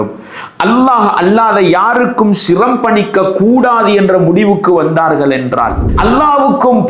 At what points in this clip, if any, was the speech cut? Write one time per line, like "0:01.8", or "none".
0:05.8

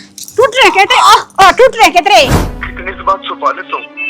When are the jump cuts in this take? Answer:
0:02.4

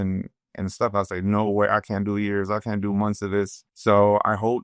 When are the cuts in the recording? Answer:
0:03.6

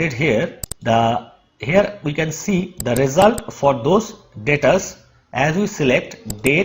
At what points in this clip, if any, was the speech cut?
none

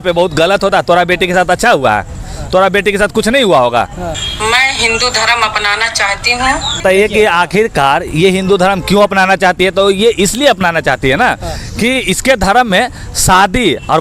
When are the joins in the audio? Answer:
0:04.1
0:06.8

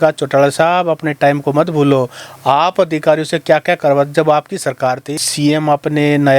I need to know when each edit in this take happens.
0:05.1

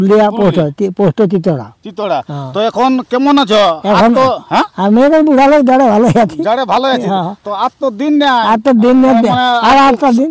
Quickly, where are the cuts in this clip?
none

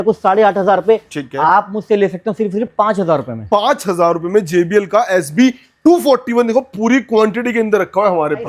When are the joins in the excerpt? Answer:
none

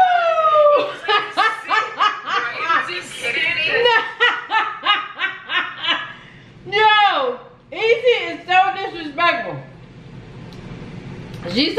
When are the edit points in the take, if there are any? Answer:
none

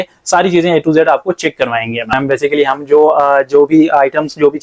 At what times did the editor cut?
0:02.1

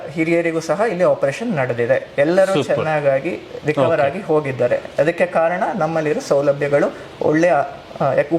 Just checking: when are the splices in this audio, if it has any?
none

